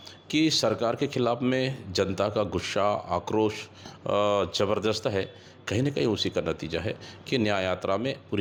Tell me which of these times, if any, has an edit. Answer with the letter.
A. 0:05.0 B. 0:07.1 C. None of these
C